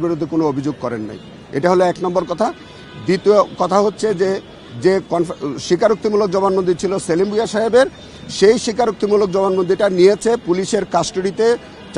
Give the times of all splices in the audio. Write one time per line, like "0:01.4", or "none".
none

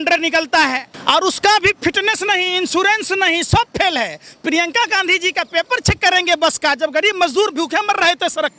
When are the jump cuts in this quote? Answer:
0:00.9

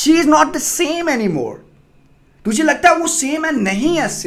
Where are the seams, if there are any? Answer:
none

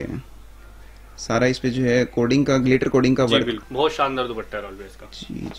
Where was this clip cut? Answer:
0:03.6

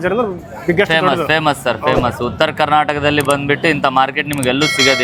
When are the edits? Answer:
none

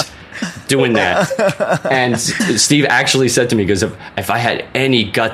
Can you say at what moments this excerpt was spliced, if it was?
0:02.3

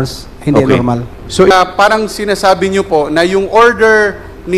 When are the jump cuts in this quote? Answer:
0:01.5

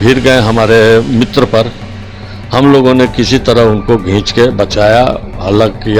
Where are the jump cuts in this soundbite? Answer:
none

